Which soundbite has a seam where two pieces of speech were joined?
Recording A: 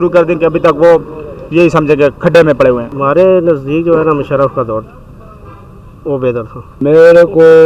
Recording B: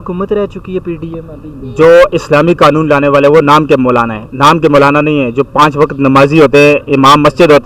A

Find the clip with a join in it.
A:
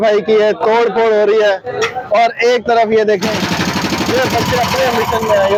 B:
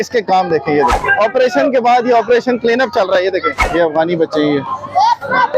B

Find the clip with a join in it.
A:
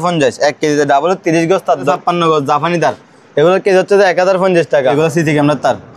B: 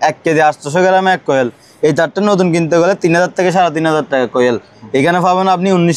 A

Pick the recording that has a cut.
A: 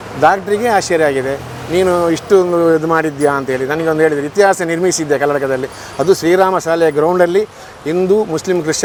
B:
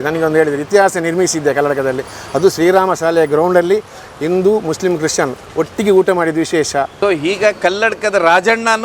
B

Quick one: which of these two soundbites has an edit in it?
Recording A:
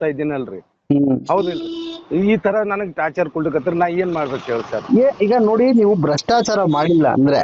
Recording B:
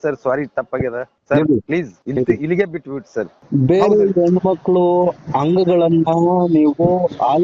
B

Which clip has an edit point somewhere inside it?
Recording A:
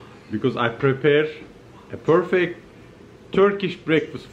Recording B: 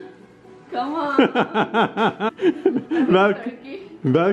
B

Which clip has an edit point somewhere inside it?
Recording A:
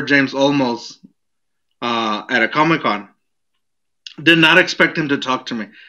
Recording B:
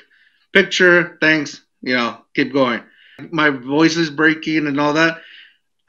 B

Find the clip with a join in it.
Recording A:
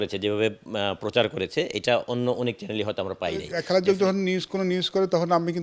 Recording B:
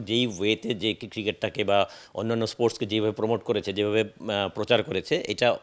A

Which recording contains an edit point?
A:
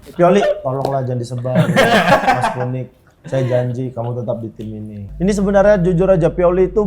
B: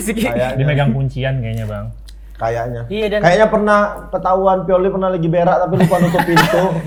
A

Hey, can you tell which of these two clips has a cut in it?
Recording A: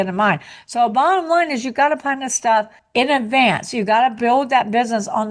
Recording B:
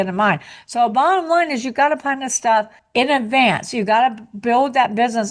A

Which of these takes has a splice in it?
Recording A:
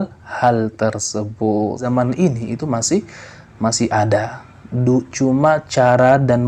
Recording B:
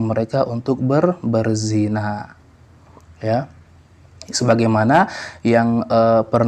A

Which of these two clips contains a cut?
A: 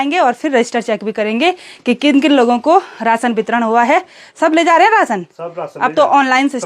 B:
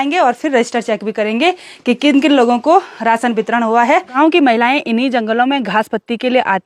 B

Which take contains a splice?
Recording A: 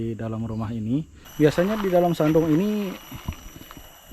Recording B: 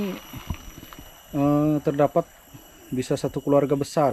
A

